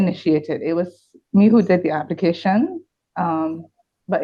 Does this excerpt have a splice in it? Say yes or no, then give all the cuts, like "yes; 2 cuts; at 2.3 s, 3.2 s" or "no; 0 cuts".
no; 0 cuts